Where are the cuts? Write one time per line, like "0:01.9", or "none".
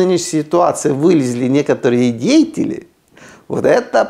none